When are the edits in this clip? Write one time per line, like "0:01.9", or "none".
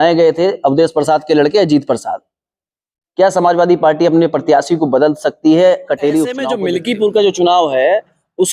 0:06.5

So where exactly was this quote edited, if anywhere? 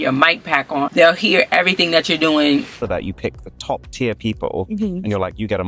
0:00.9
0:02.8

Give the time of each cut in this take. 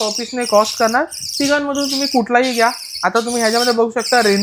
none

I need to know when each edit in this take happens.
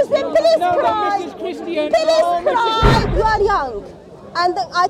0:03.0

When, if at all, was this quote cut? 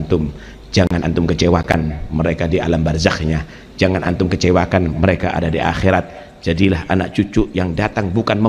none

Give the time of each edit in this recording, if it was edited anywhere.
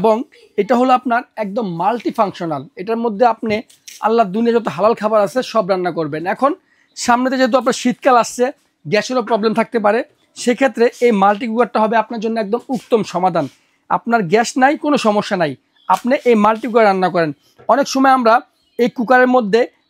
none

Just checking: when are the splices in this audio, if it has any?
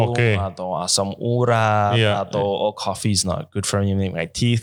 none

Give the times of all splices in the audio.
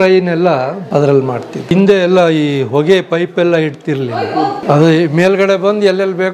0:00.8
0:01.7
0:04.6

